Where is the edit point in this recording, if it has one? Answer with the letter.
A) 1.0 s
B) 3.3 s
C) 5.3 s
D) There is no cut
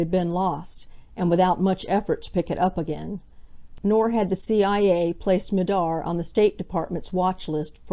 B